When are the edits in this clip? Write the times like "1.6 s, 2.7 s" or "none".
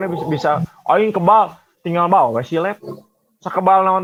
none

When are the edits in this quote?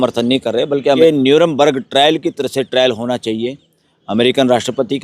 1.0 s

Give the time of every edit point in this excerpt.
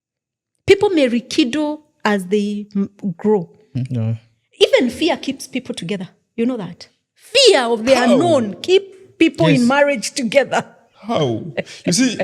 none

